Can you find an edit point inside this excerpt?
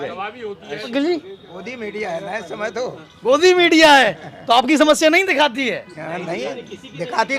yes; 1 cut; at 0.9 s

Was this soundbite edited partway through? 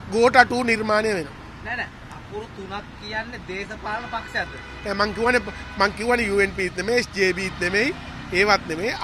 no; 0 cuts

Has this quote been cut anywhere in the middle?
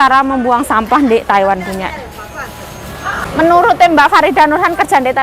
yes; 1 cut; at 3.2 s

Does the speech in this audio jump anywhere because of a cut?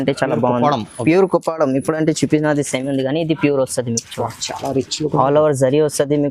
no; 0 cuts

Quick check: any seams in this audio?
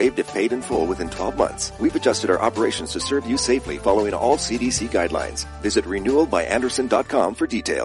yes; 1 cut; at 1.6 s

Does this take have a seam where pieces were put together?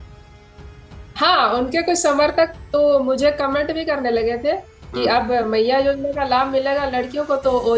no; 0 cuts

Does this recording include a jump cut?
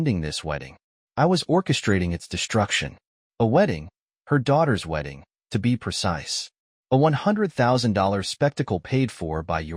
no; 0 cuts

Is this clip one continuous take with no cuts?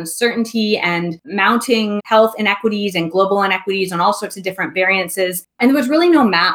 yes; 0 cuts

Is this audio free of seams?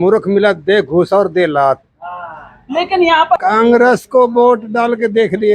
no; 1 cut; at 3.4 s

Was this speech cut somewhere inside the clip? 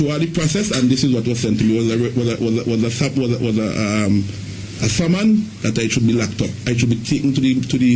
no; 0 cuts

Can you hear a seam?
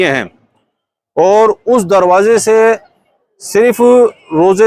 no; 0 cuts

